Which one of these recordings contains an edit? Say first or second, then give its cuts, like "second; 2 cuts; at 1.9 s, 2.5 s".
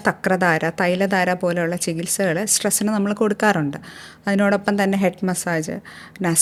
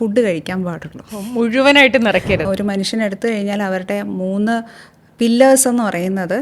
second; 1 cut; at 2.4 s